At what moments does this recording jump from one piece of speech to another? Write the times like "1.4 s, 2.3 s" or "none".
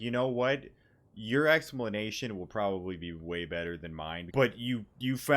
4.3 s